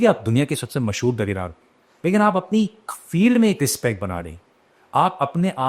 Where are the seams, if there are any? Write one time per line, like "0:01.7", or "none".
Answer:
none